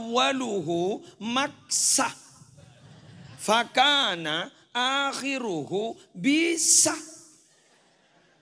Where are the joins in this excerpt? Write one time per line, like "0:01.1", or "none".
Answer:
none